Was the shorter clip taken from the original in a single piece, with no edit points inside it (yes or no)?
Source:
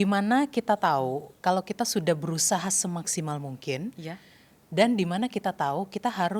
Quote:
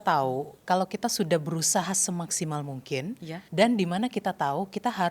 no